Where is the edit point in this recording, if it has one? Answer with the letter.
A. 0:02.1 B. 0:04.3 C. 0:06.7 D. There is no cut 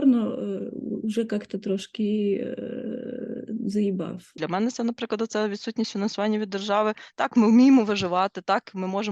B